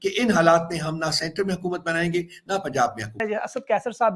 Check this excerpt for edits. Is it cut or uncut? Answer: cut